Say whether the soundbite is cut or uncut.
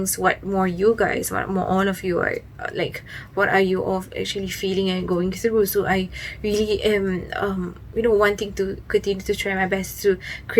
uncut